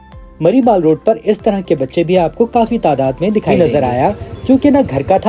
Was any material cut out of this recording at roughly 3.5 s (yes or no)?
yes